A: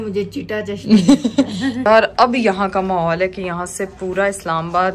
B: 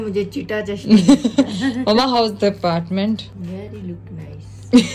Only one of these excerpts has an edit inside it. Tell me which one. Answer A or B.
A